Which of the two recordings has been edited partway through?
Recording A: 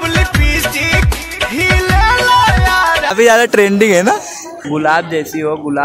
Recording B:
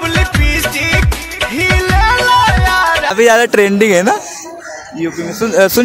A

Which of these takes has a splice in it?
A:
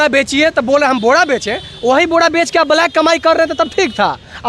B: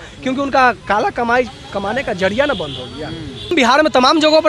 B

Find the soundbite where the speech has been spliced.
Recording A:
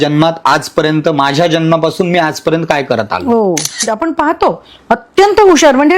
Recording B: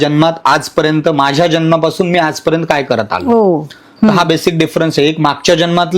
A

